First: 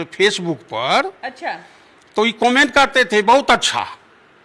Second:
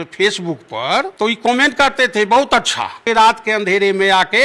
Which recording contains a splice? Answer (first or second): second